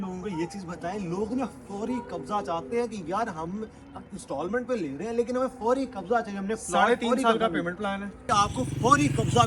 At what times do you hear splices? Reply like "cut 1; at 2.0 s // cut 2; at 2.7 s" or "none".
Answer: cut 1; at 8.2 s